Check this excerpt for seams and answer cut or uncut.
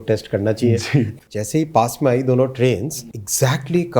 cut